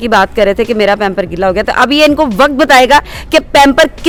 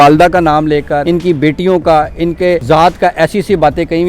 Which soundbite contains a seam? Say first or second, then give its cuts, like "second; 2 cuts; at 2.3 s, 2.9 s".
second; 2 cuts; at 1.0 s, 2.6 s